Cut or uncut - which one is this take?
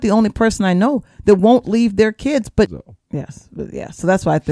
cut